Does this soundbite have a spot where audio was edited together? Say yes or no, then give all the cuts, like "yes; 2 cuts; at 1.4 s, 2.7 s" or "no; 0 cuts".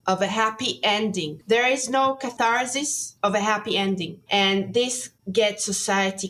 yes; 2 cuts; at 1.4 s, 2.3 s